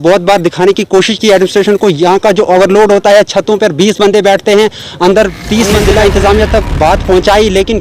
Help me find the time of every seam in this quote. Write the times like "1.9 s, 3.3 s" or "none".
5.7 s